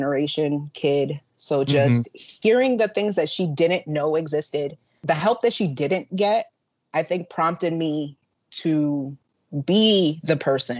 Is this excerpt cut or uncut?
cut